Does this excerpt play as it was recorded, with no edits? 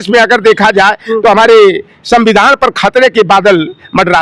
yes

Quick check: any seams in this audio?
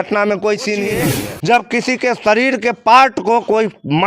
yes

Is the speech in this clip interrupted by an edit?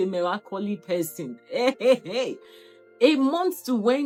no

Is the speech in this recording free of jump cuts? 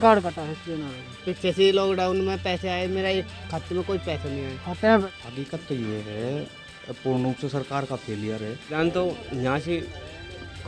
no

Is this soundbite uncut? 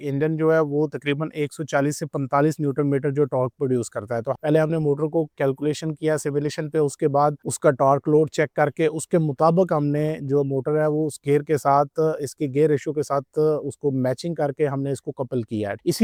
yes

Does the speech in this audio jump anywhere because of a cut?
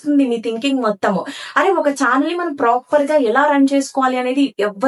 no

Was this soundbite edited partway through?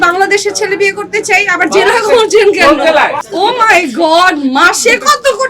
yes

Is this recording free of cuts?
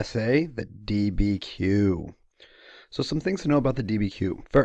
yes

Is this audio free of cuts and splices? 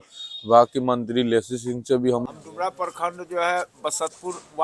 no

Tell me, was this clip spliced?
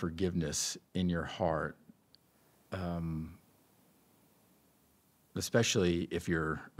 no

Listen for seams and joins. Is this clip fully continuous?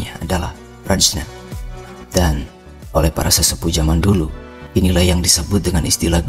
yes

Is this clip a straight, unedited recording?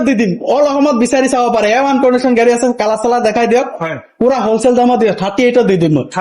yes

